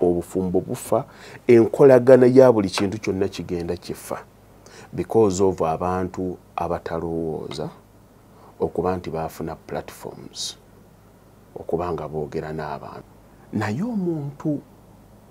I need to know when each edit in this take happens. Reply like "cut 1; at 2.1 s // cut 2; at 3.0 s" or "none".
cut 1; at 13.0 s